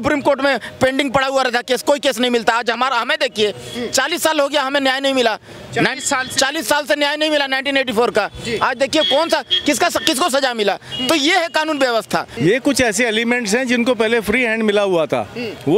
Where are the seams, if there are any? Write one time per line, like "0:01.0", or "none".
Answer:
0:12.3